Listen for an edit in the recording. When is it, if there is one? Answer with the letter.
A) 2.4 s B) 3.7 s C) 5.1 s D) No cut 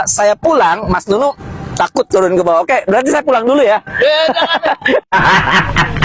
C